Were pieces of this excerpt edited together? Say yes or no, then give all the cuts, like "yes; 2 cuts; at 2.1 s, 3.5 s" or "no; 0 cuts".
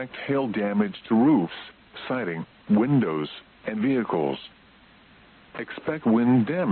no; 0 cuts